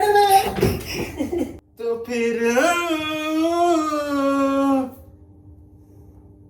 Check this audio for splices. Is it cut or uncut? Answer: cut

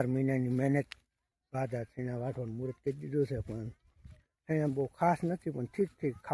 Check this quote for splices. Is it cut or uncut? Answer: uncut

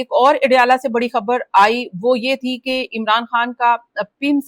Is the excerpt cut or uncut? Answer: uncut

